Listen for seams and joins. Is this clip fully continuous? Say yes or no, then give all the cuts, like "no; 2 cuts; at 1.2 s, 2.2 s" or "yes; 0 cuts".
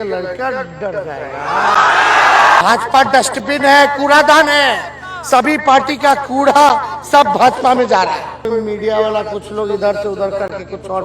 no; 2 cuts; at 2.6 s, 8.5 s